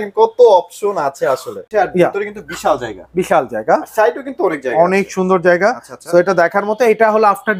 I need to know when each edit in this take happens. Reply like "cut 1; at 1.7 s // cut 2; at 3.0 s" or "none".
cut 1; at 1.6 s